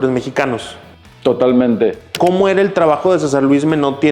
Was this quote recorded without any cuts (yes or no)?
no